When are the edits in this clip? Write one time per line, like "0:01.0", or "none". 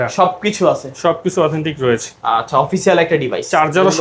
none